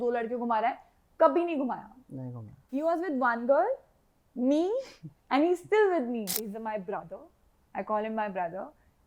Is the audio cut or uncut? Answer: cut